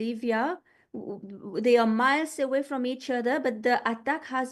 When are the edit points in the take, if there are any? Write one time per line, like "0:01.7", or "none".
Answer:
none